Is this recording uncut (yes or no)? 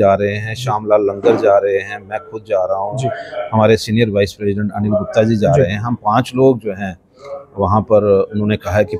yes